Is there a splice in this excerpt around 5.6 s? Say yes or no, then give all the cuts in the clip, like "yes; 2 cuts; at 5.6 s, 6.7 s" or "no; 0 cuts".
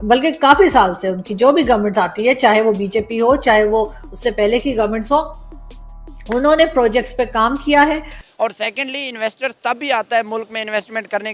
no; 1 cut; at 8.2 s